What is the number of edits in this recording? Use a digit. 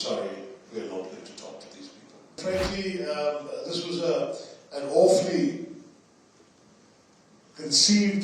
1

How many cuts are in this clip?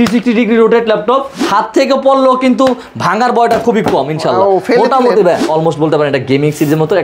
2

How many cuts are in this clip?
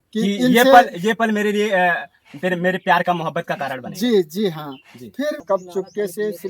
1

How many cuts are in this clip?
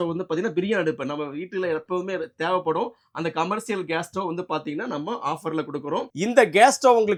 0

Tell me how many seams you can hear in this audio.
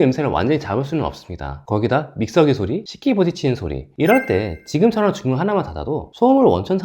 1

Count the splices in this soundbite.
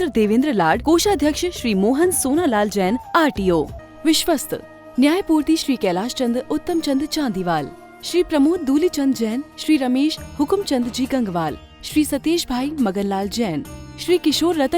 1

